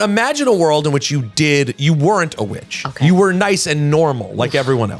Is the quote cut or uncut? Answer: uncut